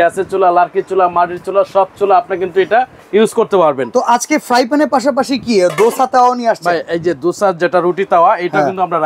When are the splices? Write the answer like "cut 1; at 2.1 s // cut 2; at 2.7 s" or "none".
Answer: none